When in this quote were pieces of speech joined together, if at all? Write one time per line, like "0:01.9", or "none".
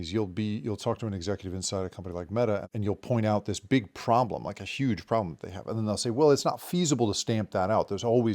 0:02.7